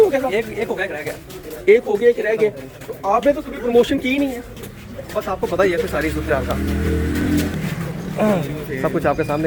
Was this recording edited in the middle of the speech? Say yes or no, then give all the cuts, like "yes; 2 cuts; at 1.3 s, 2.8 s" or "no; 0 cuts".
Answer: no; 0 cuts